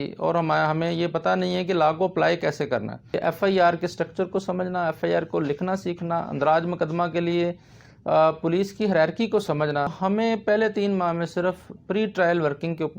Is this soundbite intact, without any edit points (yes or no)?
no